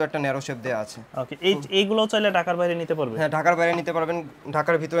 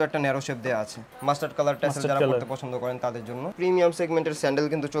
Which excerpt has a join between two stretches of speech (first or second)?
second